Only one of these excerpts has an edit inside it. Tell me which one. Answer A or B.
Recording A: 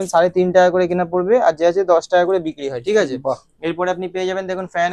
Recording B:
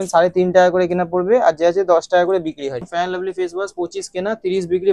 B